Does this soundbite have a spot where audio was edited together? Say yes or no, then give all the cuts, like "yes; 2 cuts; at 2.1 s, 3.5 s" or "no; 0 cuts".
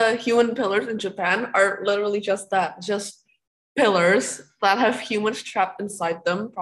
no; 0 cuts